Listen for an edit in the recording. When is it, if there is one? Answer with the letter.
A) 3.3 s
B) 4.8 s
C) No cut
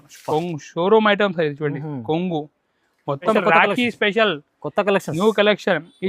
A